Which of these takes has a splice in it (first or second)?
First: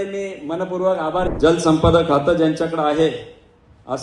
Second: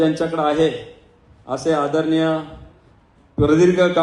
first